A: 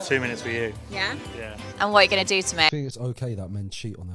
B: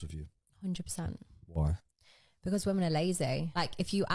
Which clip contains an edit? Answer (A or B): A